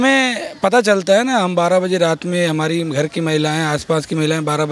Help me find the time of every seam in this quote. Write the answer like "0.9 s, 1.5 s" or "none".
none